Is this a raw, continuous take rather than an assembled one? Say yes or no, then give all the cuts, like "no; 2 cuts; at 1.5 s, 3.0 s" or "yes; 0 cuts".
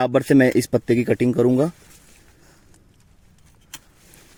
yes; 0 cuts